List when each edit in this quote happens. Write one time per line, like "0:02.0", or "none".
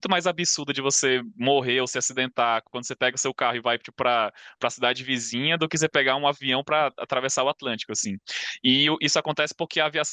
none